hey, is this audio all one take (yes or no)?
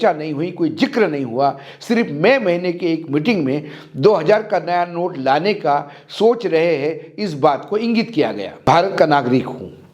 no